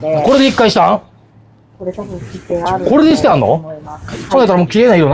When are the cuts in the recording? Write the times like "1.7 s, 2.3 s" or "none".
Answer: none